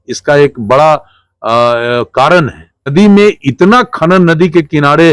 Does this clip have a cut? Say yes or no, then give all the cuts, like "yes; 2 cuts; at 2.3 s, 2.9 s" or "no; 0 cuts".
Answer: yes; 1 cut; at 2.9 s